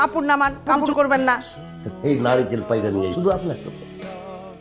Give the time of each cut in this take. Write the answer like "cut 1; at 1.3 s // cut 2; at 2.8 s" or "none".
cut 1; at 1.9 s